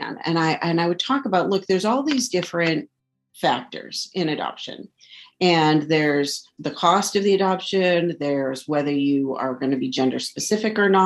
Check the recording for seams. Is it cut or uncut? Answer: uncut